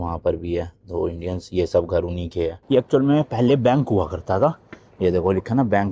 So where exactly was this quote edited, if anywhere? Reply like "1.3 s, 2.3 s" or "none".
2.6 s